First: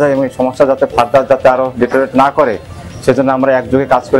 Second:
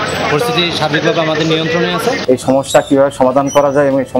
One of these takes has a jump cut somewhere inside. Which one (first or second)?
second